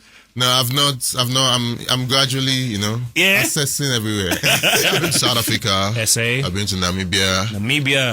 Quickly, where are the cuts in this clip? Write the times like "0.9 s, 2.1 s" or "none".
5.2 s